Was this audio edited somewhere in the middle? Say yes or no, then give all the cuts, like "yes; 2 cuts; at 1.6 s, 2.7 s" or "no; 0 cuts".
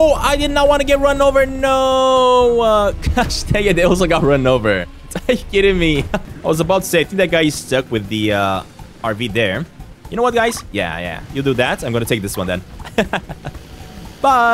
yes; 2 cuts; at 6.3 s, 8.8 s